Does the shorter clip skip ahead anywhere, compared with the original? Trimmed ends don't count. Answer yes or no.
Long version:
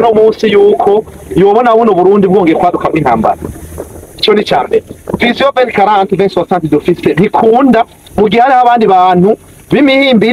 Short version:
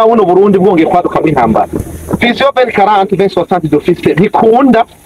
yes